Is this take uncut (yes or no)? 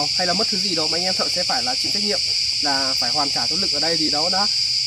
yes